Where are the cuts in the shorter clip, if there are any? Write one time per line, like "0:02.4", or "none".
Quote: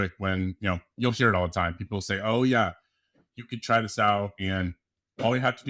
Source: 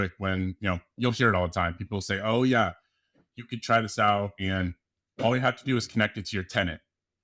none

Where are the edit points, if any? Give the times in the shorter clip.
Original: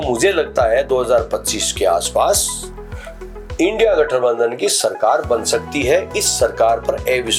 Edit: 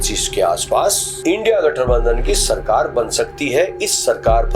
0:01.1

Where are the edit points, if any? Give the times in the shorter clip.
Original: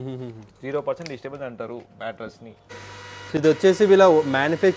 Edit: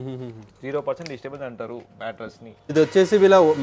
0:02.7

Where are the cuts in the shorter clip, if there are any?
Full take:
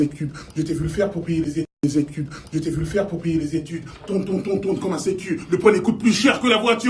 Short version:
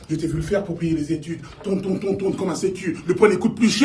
0:00.9

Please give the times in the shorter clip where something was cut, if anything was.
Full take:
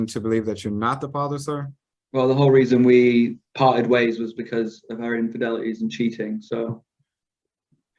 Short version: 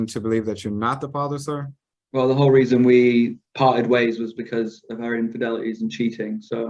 none

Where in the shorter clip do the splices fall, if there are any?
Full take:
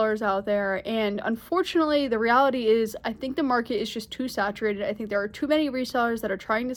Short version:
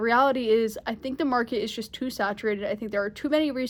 none

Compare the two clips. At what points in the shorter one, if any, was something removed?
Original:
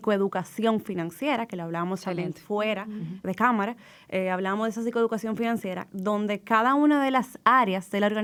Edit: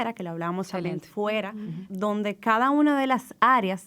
0:01.8

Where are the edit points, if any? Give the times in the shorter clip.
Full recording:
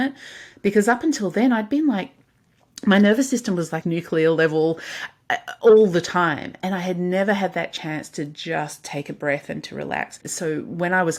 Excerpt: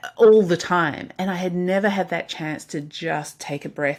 none

